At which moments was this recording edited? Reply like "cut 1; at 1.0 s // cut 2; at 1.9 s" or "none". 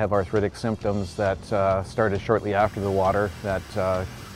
none